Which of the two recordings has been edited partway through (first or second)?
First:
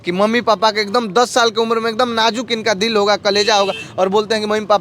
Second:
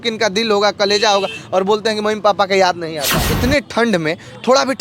second